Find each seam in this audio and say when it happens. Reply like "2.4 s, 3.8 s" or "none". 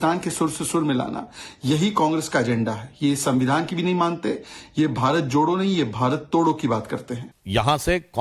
2.2 s

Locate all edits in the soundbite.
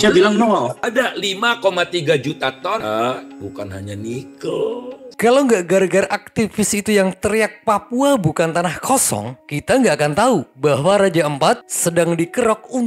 0.8 s, 2.8 s, 5.1 s

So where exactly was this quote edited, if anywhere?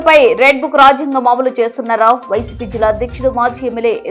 none

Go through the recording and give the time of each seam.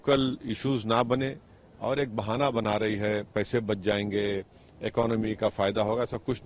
none

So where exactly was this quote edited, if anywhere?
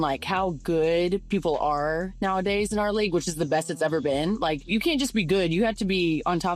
1.2 s

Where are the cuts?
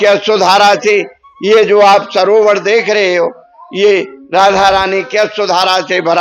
none

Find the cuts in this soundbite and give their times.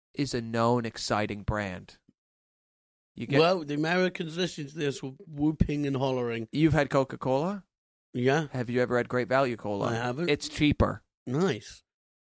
none

